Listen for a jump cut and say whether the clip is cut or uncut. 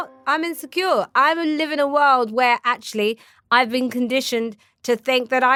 uncut